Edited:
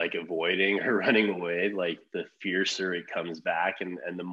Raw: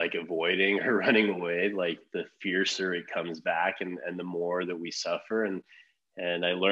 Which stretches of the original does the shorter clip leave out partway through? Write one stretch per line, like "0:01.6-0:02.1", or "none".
none

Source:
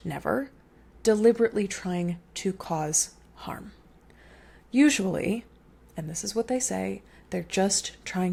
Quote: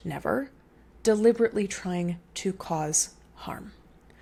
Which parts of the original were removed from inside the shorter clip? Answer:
none

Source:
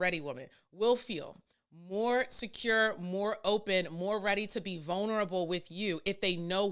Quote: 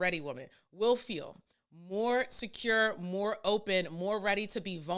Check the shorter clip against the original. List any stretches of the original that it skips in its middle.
none

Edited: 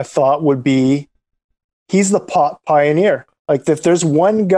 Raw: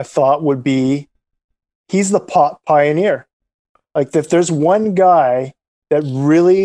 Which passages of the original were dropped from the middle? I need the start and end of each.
0:03.3-0:03.8

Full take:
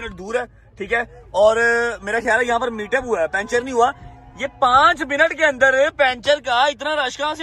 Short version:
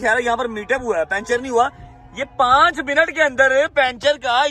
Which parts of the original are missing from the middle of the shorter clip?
none

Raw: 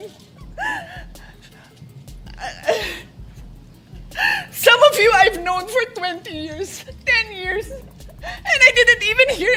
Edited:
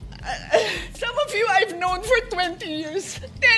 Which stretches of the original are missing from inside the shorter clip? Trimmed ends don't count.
0:03.3-0:04.8

